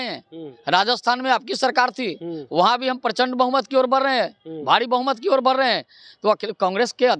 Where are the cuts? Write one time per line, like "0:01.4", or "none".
none